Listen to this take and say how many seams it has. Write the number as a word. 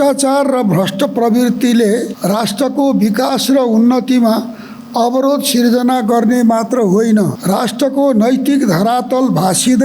two